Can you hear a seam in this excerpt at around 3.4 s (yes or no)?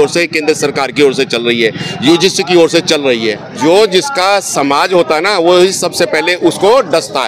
yes